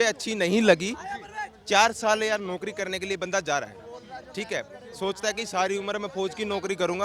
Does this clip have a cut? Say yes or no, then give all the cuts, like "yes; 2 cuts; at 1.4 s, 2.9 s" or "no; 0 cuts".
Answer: no; 0 cuts